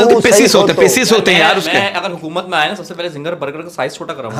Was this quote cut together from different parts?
no; 0 cuts

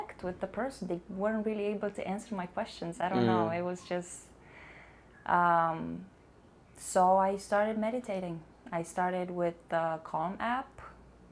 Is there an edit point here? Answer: no; 0 cuts

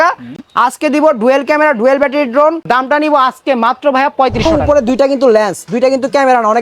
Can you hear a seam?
yes; 2 cuts; at 2.6 s, 4.6 s

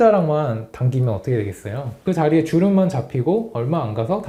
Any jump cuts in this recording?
no; 0 cuts

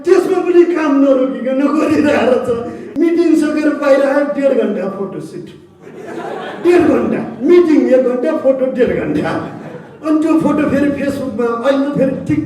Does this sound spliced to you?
yes; 1 cut; at 2.8 s

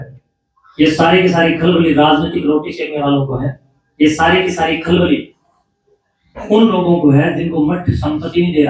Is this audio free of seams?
yes; 0 cuts

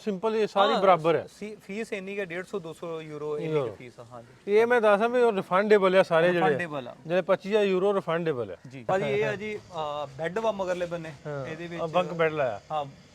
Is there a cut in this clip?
yes; 1 cut; at 8.9 s

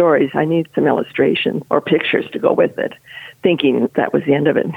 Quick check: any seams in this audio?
yes; 2 cuts; at 1.6 s, 3.9 s

